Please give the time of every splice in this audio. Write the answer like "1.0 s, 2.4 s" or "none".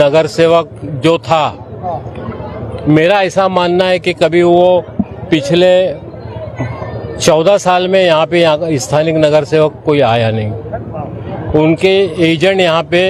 none

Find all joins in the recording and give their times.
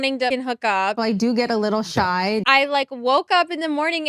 1.0 s, 2.4 s

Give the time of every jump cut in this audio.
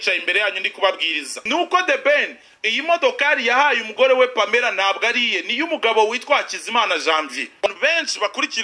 1.4 s, 7.7 s

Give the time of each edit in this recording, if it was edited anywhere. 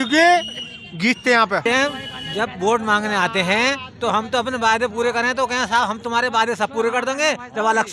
1.6 s

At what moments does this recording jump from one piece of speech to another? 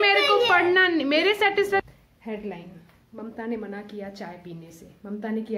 1.8 s

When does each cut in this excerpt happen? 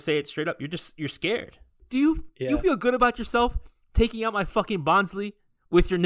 1.8 s

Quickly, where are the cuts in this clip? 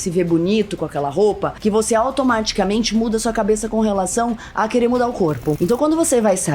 1.5 s, 5.6 s

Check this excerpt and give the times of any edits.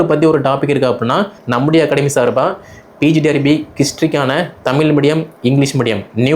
1.4 s

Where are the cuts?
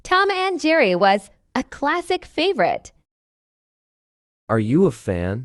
none

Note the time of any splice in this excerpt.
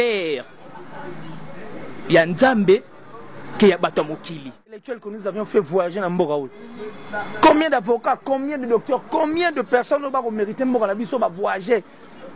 5.0 s

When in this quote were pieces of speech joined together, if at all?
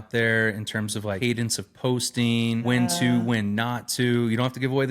1.2 s, 2.6 s

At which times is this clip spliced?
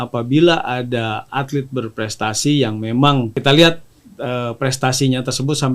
3.4 s

